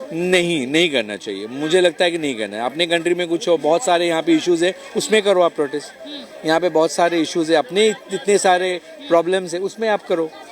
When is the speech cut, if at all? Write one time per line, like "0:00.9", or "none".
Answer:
none